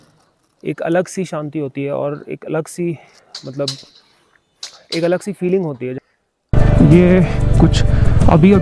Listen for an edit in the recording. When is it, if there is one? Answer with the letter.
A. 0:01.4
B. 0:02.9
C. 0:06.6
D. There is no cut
C